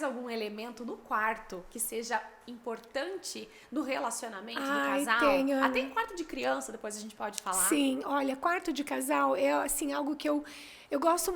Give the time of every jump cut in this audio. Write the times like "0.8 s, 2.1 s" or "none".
none